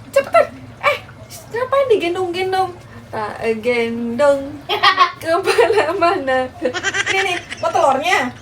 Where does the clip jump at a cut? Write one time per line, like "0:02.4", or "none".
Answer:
none